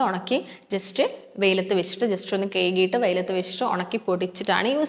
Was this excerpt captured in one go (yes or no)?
yes